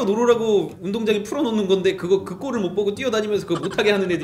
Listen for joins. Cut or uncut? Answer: uncut